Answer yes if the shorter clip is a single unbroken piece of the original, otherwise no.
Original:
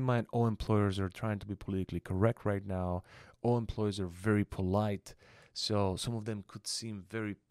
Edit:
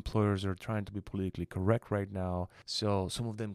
no